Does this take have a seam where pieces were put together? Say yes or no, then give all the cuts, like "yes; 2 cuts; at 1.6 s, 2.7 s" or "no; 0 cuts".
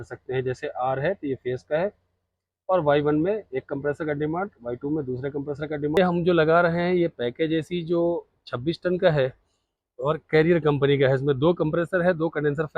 yes; 1 cut; at 6.0 s